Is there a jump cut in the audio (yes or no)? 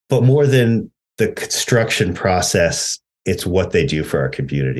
yes